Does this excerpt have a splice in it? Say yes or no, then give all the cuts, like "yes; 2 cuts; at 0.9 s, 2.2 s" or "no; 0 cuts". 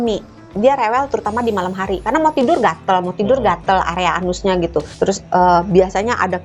yes; 1 cut; at 4.9 s